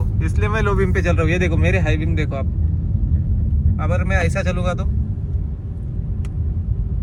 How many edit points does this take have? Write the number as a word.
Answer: zero